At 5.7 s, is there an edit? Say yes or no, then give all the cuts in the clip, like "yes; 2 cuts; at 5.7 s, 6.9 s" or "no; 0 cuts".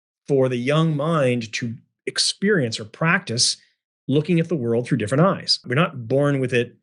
yes; 1 cut; at 5.7 s